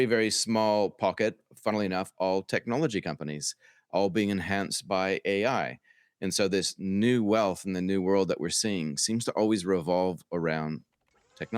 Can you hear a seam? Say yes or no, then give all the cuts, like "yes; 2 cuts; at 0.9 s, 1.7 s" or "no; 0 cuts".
no; 0 cuts